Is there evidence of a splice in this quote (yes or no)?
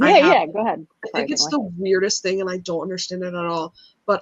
yes